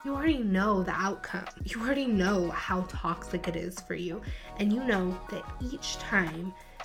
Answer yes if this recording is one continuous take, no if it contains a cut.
yes